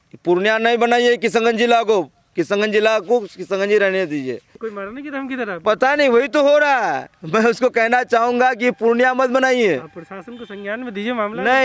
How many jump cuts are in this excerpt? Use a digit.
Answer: 1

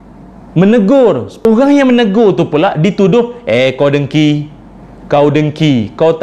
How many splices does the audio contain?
1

